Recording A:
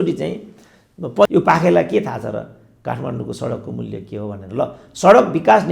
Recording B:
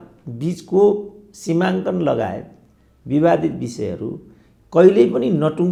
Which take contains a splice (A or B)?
A